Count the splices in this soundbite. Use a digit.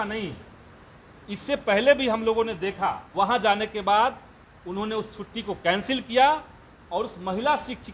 1